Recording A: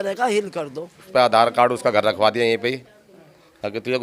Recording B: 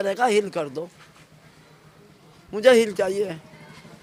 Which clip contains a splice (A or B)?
A